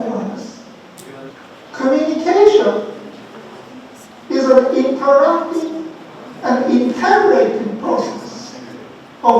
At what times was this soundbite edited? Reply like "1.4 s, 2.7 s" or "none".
1.3 s